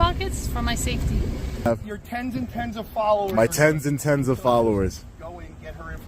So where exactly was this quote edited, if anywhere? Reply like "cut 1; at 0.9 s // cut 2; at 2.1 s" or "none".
cut 1; at 1.7 s